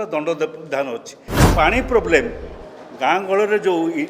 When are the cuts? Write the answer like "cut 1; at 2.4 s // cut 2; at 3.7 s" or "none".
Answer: cut 1; at 1.5 s